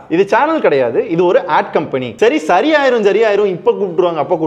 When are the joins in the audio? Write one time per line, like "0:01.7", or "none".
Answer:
0:02.1